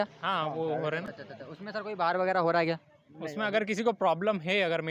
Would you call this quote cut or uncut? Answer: uncut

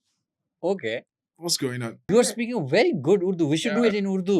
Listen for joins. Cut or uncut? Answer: cut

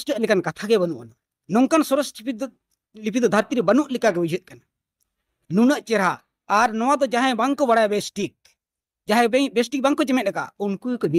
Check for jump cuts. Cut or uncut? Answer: uncut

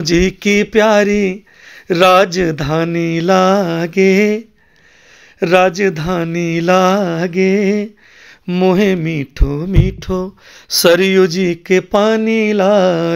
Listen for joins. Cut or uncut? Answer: uncut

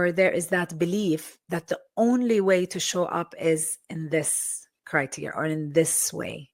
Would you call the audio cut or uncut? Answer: uncut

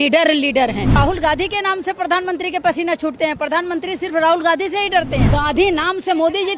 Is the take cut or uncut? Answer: cut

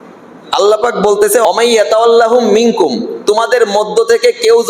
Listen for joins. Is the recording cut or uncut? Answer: cut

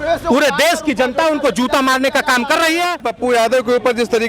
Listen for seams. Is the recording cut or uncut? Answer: cut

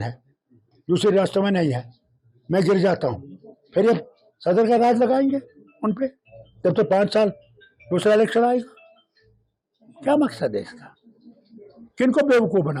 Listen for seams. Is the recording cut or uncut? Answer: uncut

